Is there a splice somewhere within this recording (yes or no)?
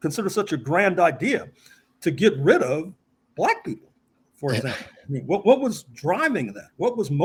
no